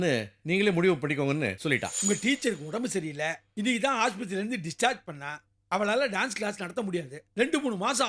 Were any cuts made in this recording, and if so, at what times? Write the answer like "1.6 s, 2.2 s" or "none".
1.9 s